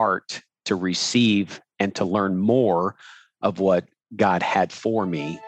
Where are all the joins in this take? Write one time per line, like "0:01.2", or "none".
none